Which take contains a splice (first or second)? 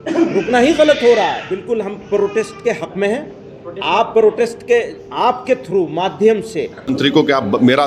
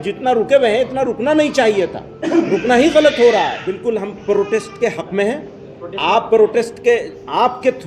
first